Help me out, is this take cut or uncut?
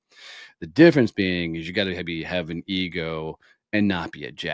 uncut